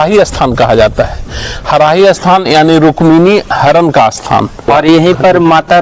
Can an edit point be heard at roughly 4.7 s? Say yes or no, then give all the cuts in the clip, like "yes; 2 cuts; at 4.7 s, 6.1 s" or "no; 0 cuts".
yes; 1 cut; at 4.7 s